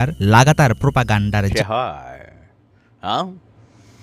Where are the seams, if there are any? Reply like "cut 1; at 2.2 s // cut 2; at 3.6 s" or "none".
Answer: cut 1; at 1.5 s